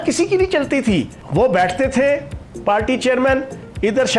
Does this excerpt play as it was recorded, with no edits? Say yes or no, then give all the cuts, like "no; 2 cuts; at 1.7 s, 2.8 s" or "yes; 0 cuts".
no; 1 cut; at 1.2 s